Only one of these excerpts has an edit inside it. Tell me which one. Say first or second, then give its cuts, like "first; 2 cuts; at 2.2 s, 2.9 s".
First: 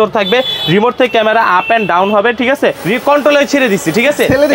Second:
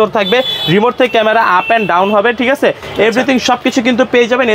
first; 1 cut; at 2.8 s